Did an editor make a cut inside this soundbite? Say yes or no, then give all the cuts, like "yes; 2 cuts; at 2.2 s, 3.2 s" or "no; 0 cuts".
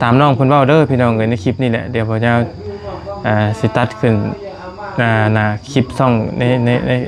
no; 0 cuts